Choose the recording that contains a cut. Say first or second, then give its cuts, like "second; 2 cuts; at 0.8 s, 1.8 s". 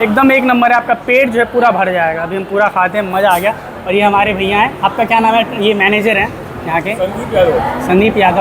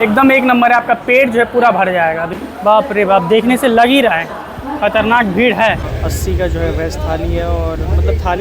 second; 2 cuts; at 2.3 s, 5.9 s